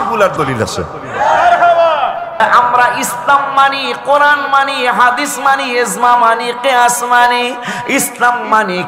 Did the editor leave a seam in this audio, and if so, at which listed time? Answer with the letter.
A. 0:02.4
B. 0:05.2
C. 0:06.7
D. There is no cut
A